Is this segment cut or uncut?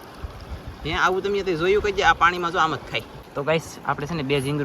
cut